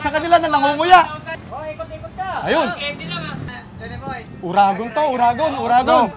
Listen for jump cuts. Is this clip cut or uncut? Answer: cut